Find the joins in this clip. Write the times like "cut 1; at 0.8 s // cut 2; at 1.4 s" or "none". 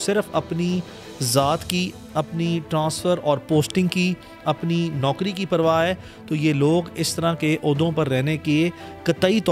none